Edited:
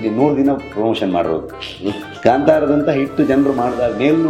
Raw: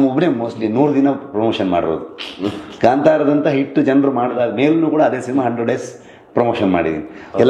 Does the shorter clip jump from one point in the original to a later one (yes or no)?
no